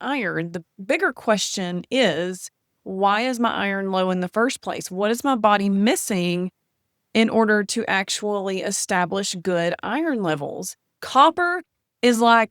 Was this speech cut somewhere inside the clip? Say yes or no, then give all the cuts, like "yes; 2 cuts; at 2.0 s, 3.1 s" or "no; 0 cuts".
yes; 1 cut; at 10.9 s